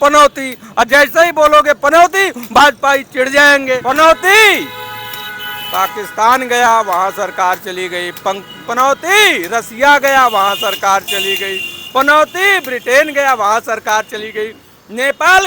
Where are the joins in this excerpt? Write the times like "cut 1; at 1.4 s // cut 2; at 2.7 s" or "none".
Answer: cut 1; at 3.8 s